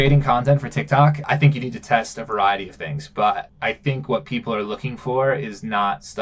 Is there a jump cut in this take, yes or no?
yes